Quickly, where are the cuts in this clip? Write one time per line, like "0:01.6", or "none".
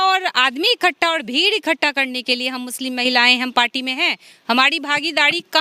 none